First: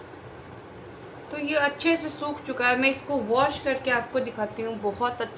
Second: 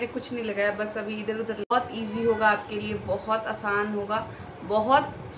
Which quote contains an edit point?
second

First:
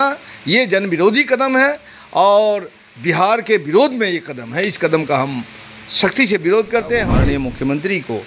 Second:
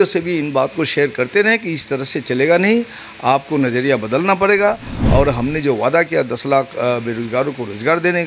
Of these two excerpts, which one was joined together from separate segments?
first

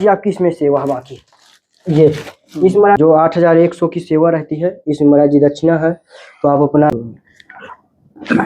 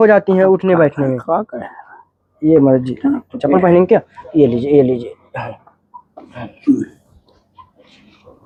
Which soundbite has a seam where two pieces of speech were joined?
first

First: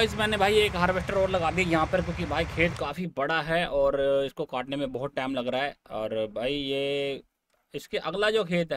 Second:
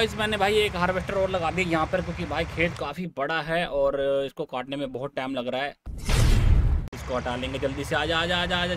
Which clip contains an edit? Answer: second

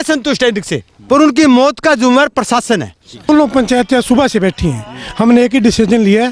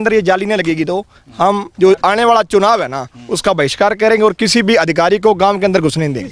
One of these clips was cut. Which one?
first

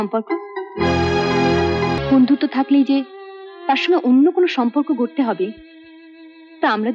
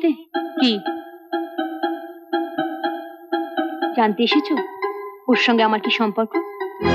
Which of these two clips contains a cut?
first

